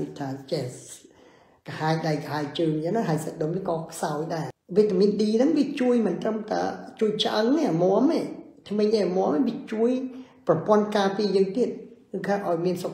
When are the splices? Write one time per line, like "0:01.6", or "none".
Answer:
0:04.5